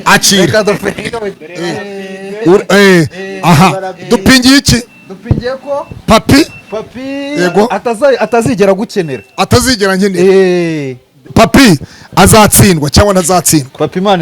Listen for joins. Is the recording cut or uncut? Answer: cut